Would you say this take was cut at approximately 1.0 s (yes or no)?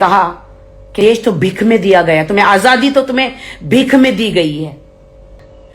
yes